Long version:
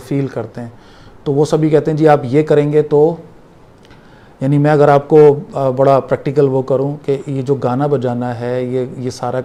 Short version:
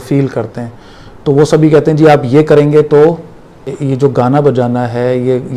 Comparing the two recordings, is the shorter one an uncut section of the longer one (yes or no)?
no